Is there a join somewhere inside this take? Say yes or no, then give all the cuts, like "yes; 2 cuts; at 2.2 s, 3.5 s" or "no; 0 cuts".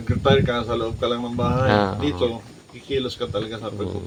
no; 0 cuts